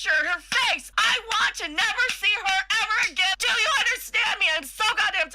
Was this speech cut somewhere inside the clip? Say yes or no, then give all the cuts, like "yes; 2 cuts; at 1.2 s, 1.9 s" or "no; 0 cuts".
yes; 2 cuts; at 0.9 s, 3.3 s